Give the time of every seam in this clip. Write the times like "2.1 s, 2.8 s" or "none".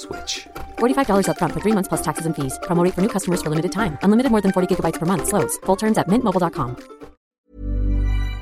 7.3 s